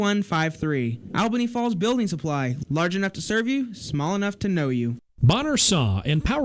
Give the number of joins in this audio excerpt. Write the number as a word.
one